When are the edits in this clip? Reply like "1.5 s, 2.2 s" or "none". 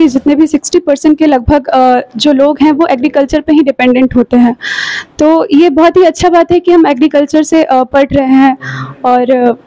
none